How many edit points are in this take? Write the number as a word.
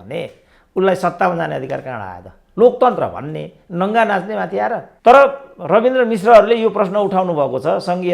one